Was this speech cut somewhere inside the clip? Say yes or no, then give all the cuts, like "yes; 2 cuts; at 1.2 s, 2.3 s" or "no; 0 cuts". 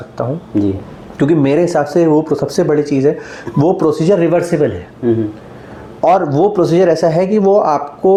no; 0 cuts